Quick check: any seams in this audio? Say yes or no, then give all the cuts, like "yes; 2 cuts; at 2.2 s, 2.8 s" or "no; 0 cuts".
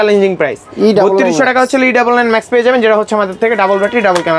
no; 0 cuts